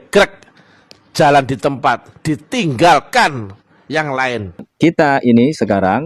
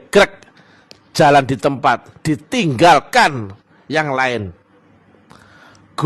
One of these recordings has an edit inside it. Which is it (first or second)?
first